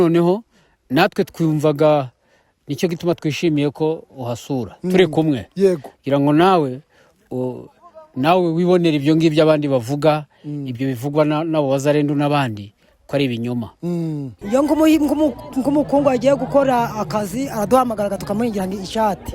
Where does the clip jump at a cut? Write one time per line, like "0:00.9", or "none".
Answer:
0:14.3

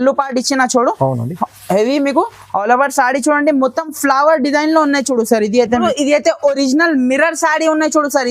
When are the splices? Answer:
0:05.9

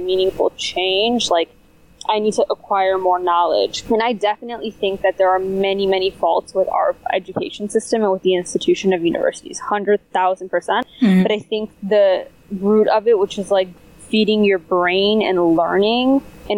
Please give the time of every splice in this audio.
0:03.8
0:10.8
0:13.7

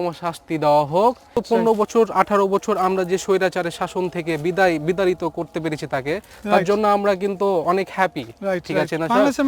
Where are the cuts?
0:01.4

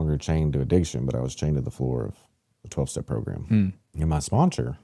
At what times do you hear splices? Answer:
0:03.9

